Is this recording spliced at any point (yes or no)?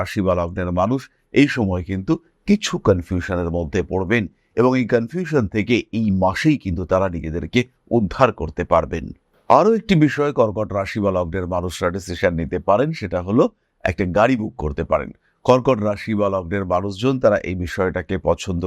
yes